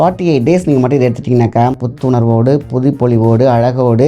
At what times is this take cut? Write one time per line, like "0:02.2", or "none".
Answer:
0:01.9